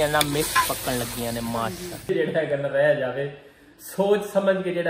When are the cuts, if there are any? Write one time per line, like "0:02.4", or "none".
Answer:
0:02.1